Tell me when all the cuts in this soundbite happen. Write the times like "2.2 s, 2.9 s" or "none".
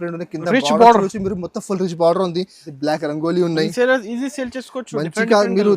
2.6 s